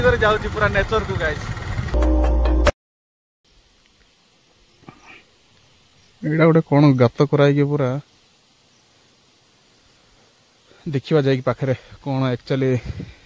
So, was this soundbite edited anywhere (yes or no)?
yes